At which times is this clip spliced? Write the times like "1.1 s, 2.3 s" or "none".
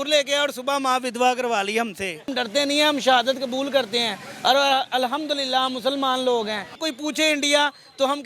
2.3 s, 6.8 s